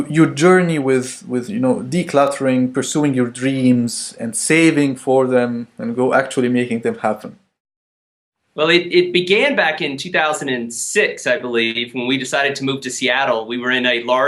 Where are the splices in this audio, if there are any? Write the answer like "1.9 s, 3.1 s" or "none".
none